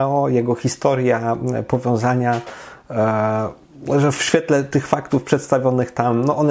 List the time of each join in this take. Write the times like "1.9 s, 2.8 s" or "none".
none